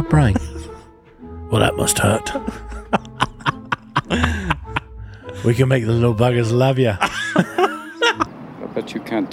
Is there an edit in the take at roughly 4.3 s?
no; 1 cut; at 8.3 s

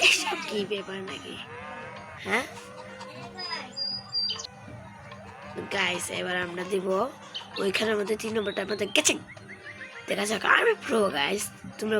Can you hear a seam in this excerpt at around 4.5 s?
yes; 1 cut; at 4.5 s

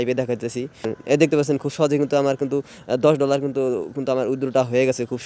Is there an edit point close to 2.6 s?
no; 1 cut; at 0.9 s

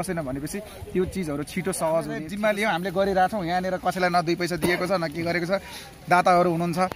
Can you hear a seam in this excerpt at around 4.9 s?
no; 1 cut; at 2.3 s

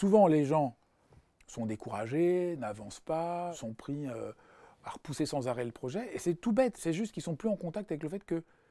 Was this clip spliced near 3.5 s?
yes; 2 cuts; at 3.5 s, 6.8 s

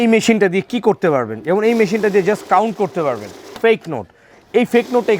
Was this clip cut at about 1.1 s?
no; 1 cut; at 3.5 s

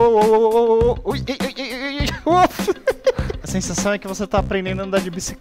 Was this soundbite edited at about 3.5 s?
yes; 1 cut; at 3.5 s

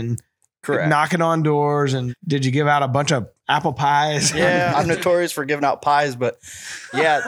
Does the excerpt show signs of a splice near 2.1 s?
yes; 2 cuts; at 2.1 s, 4.7 s

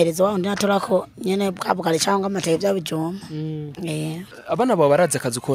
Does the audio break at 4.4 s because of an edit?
yes; 1 cut; at 4.4 s

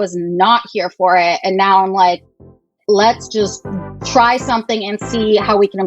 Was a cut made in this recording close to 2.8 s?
yes; 1 cut; at 2.8 s

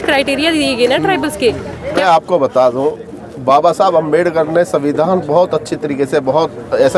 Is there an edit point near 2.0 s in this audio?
yes; 1 cut; at 2.0 s

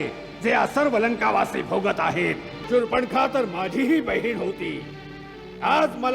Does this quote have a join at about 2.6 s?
yes; 1 cut; at 2.6 s

